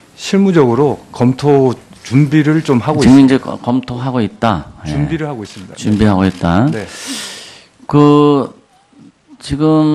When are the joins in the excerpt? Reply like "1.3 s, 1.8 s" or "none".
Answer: none